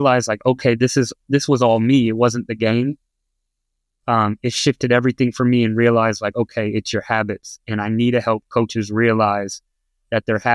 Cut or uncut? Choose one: uncut